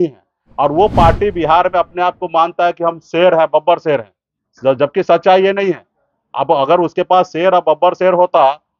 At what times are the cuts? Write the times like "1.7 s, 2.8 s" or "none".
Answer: none